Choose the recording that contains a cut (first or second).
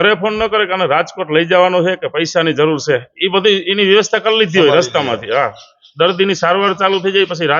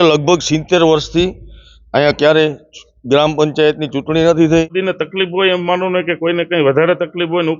second